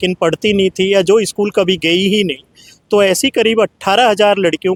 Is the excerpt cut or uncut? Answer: uncut